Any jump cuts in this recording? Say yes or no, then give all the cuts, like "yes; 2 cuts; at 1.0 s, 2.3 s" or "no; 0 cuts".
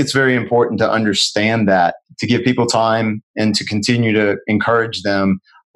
yes; 1 cut; at 2.0 s